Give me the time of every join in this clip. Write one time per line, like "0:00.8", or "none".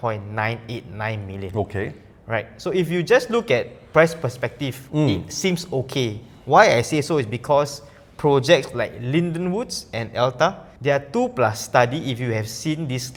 none